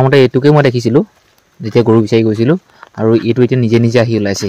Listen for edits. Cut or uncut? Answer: uncut